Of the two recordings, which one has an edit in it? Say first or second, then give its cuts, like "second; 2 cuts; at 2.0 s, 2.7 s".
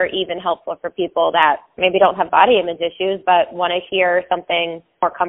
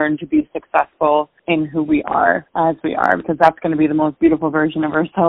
second; 2 cuts; at 1.4 s, 2.5 s